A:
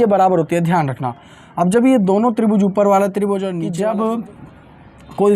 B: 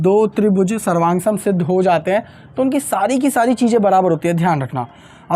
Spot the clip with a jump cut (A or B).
A